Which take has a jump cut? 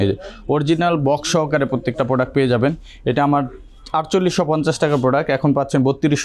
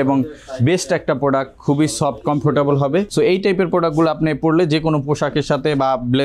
second; 1 cut; at 3.1 s

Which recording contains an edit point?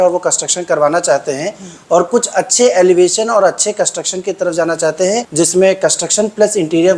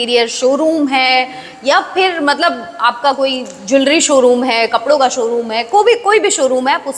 first; 1 cut; at 5.3 s

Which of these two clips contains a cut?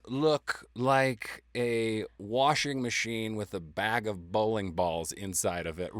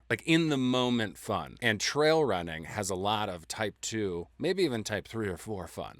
second; 1 cut; at 1.5 s

